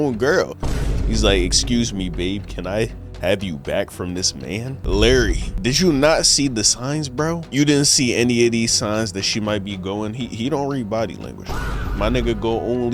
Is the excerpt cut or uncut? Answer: cut